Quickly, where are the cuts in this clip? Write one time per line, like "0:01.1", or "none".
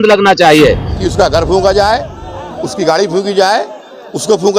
0:00.9